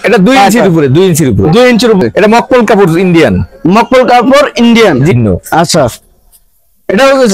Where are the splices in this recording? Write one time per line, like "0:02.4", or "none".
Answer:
0:02.0
0:05.1